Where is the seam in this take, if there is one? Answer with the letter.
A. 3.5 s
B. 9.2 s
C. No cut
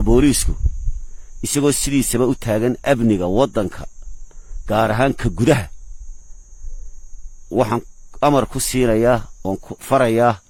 C